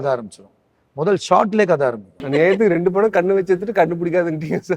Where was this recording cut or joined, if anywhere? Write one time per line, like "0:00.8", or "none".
0:02.2